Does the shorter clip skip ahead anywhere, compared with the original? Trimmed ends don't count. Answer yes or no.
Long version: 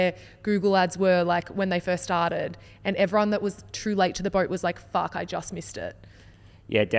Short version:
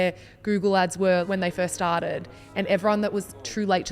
yes